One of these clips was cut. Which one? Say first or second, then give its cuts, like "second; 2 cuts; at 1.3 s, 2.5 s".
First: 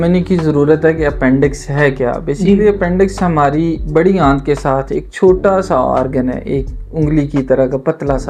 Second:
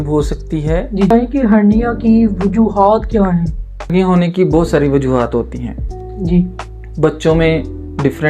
second; 2 cuts; at 1.1 s, 3.9 s